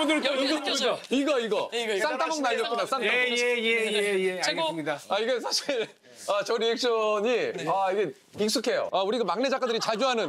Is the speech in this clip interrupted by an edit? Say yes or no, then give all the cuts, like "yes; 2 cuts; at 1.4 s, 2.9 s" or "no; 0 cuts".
no; 0 cuts